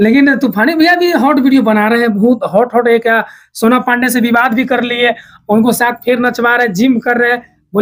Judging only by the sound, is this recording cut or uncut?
uncut